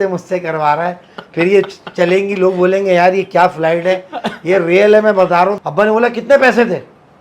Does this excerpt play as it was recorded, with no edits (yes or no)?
no